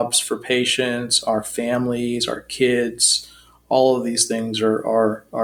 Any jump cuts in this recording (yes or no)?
no